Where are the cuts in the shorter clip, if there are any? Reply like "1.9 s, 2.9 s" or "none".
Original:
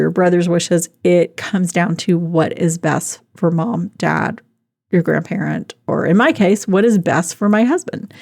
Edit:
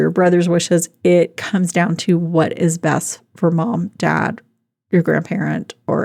none